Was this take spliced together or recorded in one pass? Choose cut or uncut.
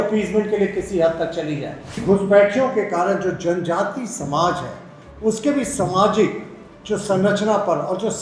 cut